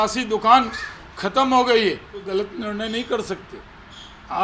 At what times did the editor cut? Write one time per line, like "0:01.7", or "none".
0:02.3